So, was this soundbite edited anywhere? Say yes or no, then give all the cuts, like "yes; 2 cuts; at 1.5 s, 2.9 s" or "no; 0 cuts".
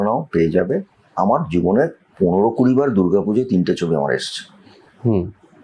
no; 0 cuts